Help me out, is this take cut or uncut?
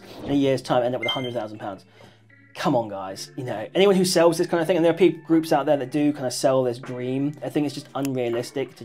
cut